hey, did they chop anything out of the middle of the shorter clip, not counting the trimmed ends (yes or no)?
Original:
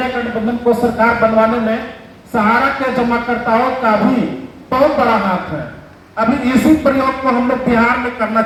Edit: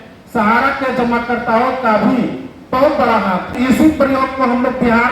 yes